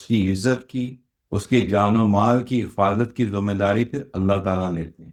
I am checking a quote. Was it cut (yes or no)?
no